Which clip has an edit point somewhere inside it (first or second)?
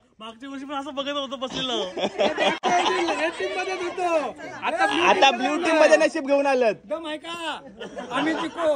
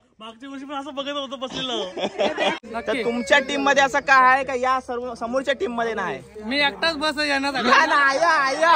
second